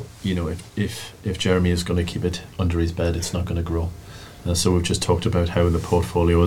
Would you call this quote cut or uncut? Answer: uncut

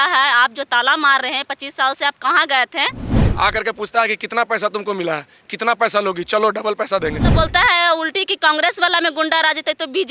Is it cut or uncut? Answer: cut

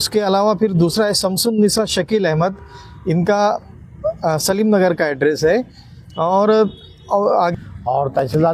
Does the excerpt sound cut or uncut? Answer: cut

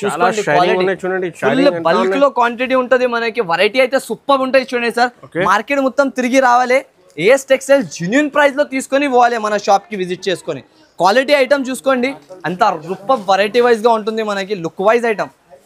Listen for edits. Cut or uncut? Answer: uncut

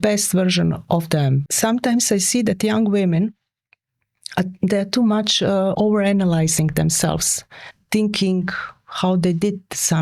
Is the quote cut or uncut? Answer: cut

